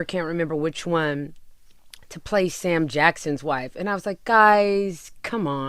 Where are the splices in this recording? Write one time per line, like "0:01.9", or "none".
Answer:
none